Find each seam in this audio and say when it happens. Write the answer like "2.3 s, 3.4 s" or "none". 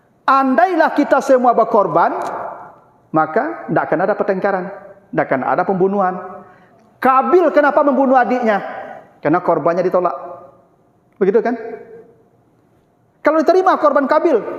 none